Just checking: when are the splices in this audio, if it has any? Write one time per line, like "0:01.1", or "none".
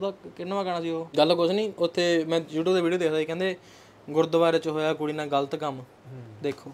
0:01.1